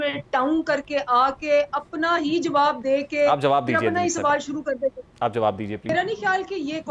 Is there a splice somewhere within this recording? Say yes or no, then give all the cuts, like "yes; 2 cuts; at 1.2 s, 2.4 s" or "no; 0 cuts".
yes; 1 cut; at 5.9 s